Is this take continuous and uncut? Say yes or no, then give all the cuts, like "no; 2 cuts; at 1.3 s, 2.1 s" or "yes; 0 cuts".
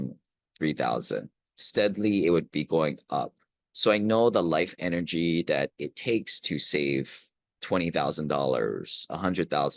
yes; 0 cuts